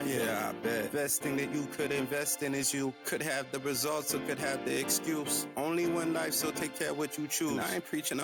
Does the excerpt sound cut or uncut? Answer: uncut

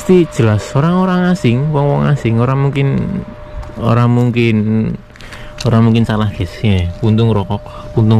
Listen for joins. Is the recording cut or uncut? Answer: uncut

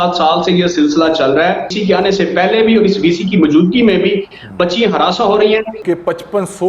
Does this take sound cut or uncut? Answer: cut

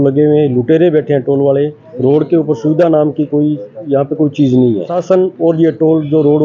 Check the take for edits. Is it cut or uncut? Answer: cut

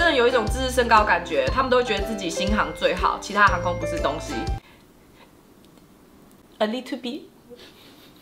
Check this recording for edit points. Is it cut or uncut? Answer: uncut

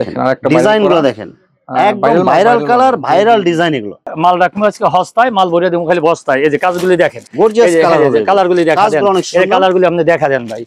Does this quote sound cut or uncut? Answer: cut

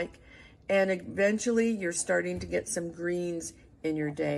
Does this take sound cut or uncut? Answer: uncut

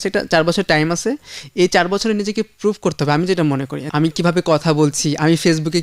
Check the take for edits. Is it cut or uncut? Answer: cut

